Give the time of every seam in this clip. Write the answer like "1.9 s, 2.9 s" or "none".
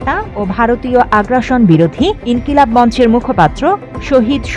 none